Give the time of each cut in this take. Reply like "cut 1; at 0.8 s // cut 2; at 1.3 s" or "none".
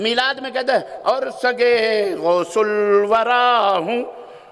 none

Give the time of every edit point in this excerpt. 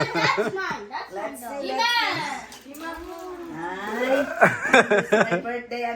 cut 1; at 4.6 s

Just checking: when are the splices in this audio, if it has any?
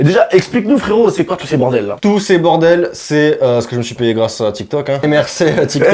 cut 1; at 2.0 s // cut 2; at 5.0 s

